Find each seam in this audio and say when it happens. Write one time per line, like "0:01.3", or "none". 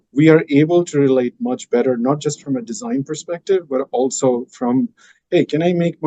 none